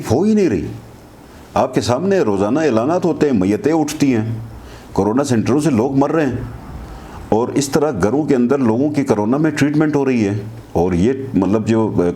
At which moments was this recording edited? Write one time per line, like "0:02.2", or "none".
none